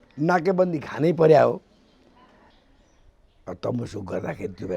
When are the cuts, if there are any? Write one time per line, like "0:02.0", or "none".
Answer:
0:02.5